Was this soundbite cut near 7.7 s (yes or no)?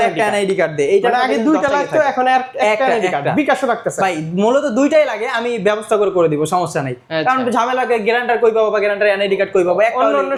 no